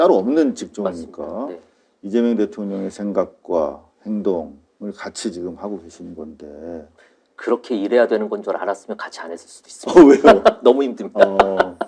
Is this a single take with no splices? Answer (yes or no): yes